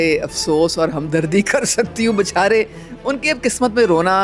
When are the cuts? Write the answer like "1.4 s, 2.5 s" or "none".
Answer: none